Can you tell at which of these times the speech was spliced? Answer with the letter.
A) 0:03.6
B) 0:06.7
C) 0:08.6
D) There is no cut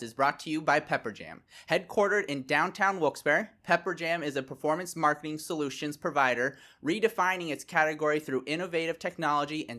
D